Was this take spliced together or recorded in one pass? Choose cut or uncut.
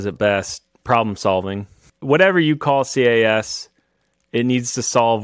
cut